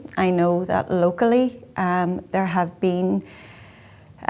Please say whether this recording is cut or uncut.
uncut